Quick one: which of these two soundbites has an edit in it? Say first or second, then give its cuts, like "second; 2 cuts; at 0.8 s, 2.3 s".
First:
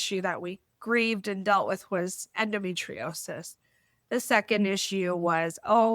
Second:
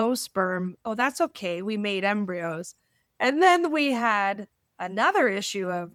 first; 1 cut; at 2.3 s